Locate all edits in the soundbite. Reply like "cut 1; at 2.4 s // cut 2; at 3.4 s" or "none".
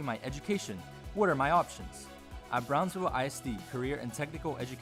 none